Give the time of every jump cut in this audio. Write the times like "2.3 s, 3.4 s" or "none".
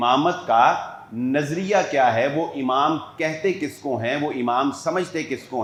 none